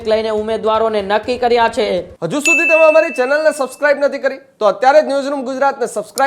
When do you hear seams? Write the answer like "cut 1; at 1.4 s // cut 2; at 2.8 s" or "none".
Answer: cut 1; at 2.1 s